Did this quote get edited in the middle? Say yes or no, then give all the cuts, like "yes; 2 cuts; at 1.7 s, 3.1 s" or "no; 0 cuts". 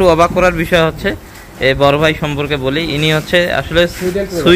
no; 0 cuts